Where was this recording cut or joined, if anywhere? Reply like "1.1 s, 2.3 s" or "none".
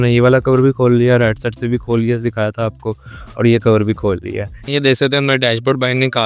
4.6 s